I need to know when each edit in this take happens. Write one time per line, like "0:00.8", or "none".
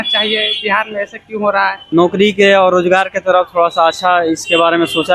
0:01.8